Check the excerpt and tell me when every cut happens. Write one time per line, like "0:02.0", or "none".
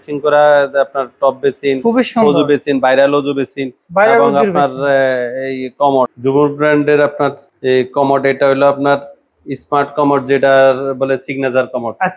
0:06.2
0:07.5

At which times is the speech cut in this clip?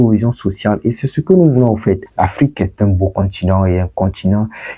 0:02.1

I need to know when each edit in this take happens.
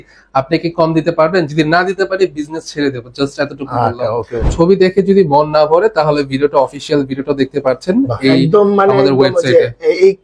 0:04.5

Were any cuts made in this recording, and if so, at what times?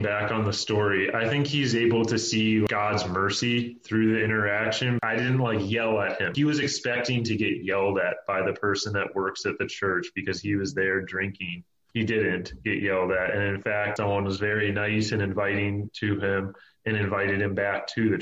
0:02.7
0:05.0
0:06.3
0:13.9

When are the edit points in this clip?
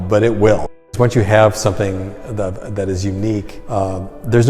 0:01.0
0:03.6

